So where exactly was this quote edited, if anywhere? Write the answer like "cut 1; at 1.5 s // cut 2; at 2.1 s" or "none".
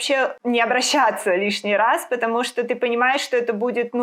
none